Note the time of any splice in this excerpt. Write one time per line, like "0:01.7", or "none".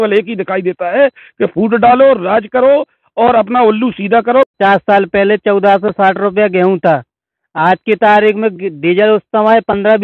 0:04.6